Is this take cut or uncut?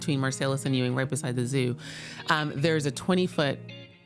uncut